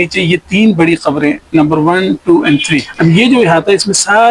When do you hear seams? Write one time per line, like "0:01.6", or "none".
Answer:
0:02.9